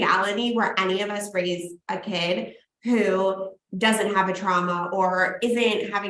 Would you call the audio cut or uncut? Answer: uncut